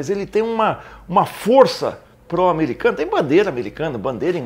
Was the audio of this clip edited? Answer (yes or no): no